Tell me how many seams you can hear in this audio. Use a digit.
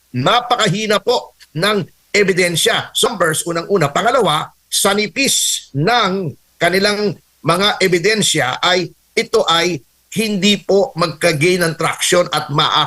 1